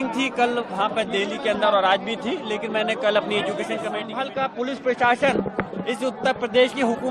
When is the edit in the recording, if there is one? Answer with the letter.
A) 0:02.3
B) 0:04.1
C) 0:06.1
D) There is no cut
B